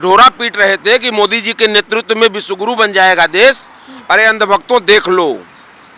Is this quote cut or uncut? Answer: uncut